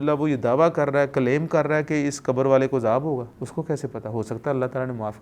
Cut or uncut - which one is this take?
cut